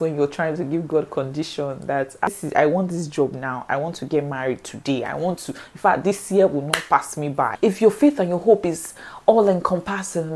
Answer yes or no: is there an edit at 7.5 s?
yes